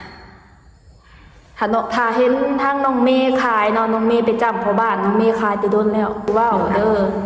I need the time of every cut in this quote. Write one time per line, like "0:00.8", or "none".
0:06.3